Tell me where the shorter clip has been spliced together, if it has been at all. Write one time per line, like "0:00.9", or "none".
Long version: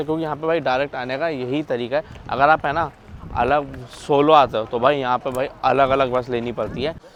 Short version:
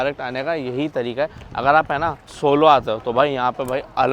0:02.2